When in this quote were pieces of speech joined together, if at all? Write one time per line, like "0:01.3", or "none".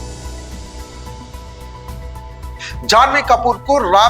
0:02.5